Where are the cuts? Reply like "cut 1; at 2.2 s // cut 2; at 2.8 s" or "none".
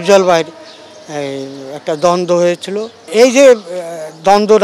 cut 1; at 3.0 s